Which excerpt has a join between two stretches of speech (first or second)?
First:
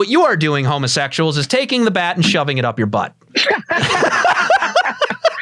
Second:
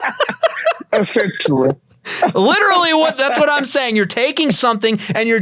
first